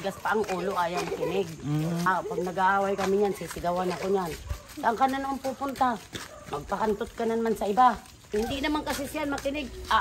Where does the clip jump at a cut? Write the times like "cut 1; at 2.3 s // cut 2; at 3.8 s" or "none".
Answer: cut 1; at 2.1 s // cut 2; at 8.3 s